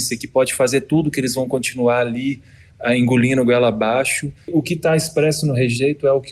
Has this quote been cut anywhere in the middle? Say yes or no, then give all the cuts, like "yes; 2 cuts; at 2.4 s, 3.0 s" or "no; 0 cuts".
yes; 1 cut; at 4.5 s